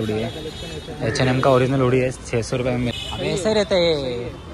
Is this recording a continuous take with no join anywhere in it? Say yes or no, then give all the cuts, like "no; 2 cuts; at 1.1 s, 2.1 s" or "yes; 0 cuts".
no; 1 cut; at 2.9 s